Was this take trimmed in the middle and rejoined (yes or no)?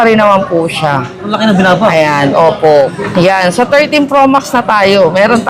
yes